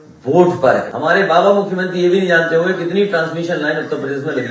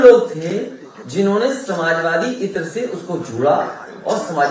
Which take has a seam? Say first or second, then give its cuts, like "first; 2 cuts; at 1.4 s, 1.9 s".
first; 1 cut; at 0.9 s